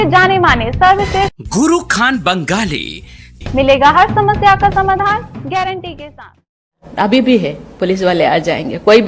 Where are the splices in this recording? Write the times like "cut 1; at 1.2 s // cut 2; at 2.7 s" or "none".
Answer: cut 1; at 6.7 s